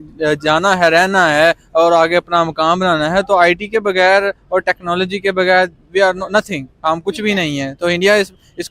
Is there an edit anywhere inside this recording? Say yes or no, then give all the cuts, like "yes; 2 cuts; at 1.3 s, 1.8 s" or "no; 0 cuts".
no; 0 cuts